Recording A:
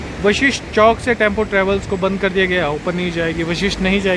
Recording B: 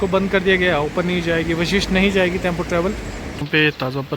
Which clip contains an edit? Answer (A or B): B